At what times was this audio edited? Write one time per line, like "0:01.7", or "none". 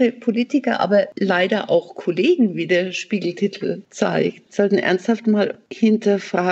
0:01.1
0:04.1
0:05.6

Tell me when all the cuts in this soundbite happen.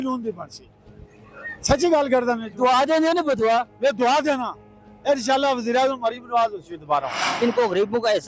0:07.2

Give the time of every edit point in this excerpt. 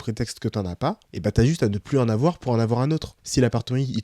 0:01.1
0:03.2

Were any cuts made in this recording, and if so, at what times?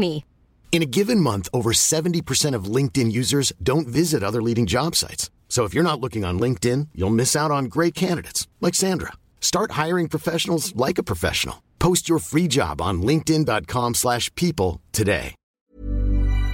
0:15.6

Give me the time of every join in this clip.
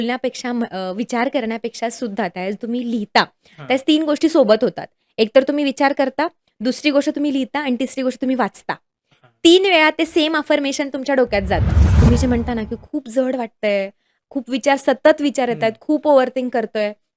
0:11.8

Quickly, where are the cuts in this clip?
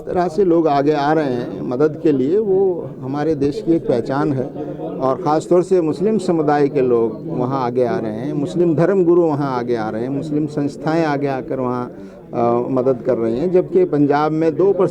none

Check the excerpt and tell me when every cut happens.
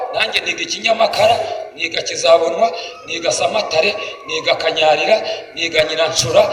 none

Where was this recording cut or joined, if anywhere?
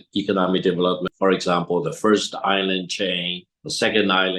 0:01.0

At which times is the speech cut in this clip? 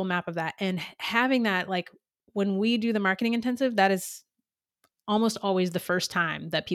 none

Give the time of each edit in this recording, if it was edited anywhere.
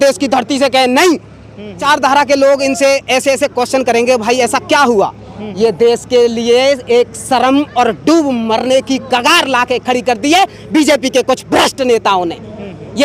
0:01.8

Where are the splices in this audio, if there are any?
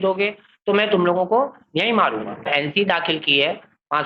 0:02.5

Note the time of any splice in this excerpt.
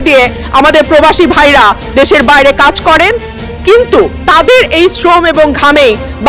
none

